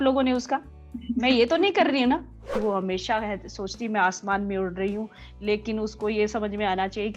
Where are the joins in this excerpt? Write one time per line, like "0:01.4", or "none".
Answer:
0:02.5